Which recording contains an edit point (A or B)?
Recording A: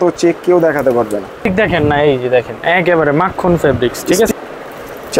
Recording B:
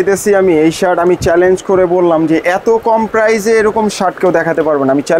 A